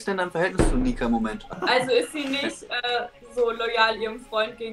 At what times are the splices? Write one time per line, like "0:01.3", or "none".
0:01.4